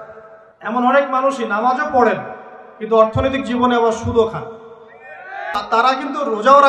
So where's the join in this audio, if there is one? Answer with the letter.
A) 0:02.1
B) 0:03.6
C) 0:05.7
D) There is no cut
C